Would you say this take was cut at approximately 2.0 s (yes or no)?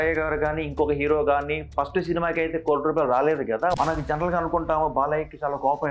no